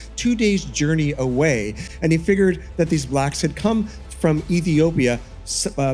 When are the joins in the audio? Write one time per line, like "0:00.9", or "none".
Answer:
none